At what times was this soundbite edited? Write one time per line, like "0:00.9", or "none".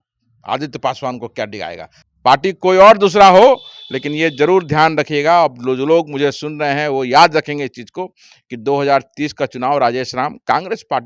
0:01.9